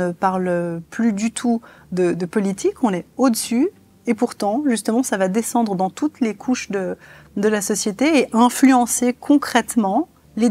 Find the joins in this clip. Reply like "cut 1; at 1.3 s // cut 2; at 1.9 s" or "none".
none